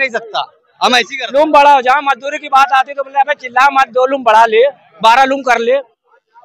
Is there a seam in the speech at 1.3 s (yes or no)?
yes